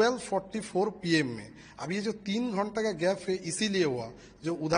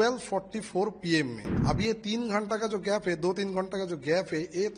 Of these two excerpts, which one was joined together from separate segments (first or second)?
second